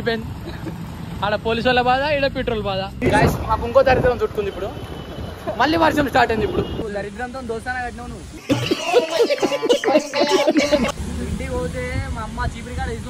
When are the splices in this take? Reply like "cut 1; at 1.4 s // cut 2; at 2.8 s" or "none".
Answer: cut 1; at 2.9 s // cut 2; at 6.8 s // cut 3; at 11.1 s